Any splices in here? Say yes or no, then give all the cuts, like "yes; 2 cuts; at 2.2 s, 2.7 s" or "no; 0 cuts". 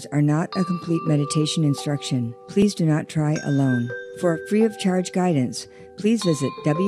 yes; 2 cuts; at 2.6 s, 4.0 s